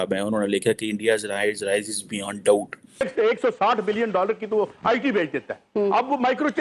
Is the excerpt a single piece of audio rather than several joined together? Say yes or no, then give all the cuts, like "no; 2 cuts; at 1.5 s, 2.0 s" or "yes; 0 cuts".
no; 1 cut; at 3.1 s